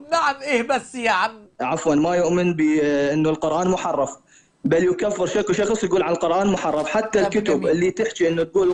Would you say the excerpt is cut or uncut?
cut